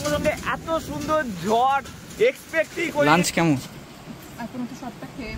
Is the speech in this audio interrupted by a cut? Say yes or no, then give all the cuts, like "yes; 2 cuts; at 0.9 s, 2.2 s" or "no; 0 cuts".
yes; 1 cut; at 3.0 s